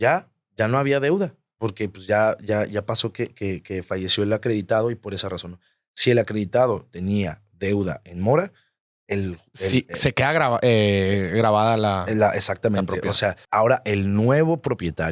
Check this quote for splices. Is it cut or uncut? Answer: cut